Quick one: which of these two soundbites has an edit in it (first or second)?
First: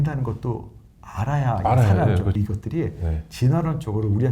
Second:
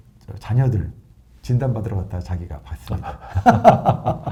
first